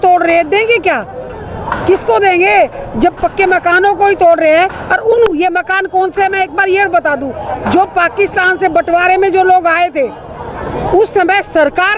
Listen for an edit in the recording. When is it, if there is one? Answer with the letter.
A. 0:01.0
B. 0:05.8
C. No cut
C